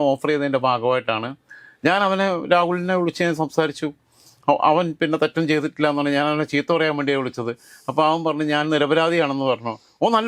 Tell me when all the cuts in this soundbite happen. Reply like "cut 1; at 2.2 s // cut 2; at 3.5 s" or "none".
none

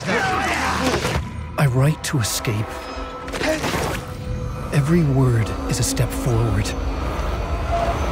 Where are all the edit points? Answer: none

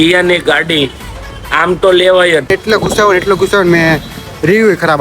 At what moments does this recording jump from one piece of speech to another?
cut 1; at 2.5 s

